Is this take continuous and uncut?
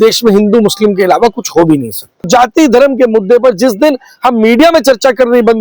no; 1 cut; at 2.3 s

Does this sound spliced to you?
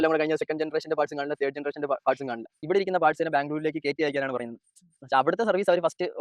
yes; 1 cut; at 2.6 s

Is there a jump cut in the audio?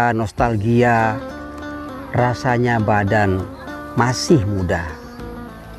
no; 0 cuts

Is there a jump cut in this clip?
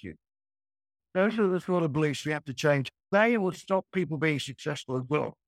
yes; 2 cuts; at 0.9 s, 2.9 s

